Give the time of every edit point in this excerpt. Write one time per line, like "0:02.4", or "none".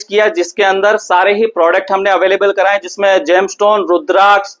none